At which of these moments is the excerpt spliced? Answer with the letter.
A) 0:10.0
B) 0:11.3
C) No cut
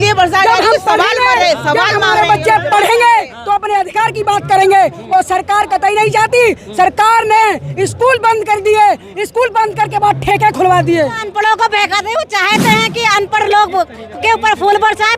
B